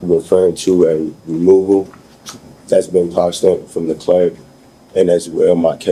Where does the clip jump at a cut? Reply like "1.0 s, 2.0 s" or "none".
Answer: none